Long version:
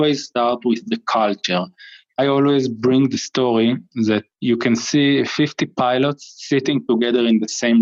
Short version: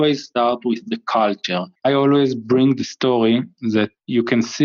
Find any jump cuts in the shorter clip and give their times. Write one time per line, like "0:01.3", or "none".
0:01.7